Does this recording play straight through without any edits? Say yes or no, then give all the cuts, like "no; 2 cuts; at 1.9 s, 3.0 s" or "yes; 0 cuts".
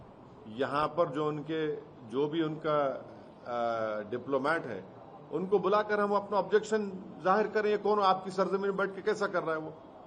yes; 0 cuts